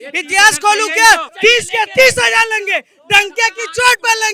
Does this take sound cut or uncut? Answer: cut